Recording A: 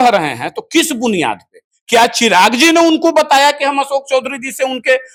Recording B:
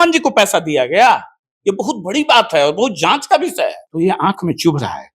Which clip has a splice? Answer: B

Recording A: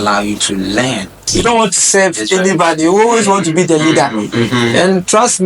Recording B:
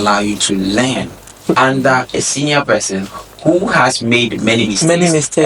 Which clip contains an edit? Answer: A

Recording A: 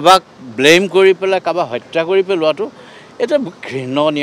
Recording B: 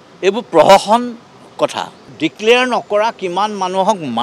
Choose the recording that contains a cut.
B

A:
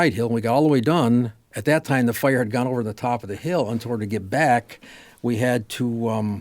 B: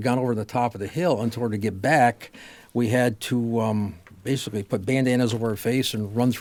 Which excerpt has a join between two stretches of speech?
A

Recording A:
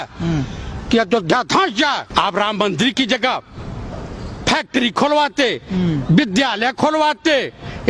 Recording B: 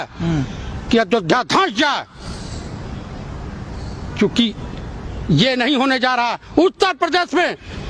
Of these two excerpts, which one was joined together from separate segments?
A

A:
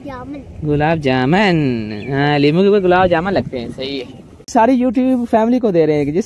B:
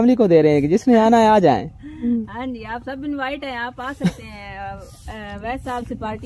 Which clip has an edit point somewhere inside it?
A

